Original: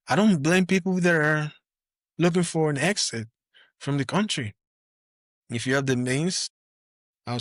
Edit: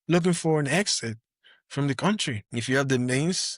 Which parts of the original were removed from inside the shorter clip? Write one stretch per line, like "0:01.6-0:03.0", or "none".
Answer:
0:04.5-0:05.4